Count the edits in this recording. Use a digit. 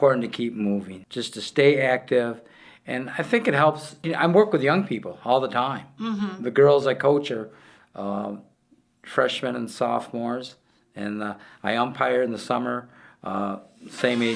1